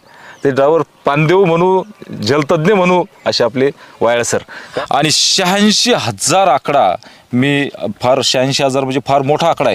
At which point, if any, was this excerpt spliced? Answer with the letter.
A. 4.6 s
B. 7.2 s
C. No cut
A